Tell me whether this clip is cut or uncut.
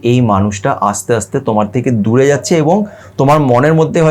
uncut